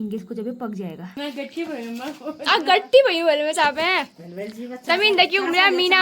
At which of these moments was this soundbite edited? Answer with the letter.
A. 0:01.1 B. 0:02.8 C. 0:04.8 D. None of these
A